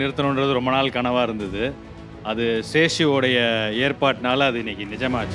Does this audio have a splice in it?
no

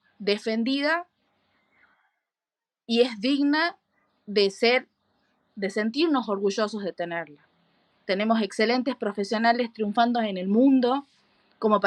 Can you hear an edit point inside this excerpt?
no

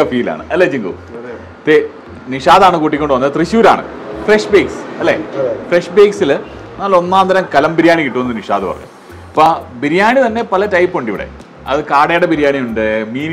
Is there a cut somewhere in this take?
no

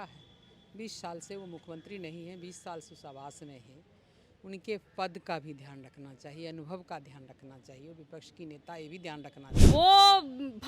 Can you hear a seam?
yes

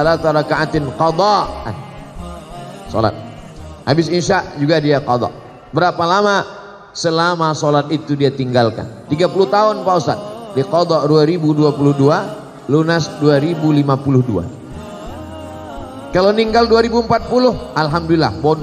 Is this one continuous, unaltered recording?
no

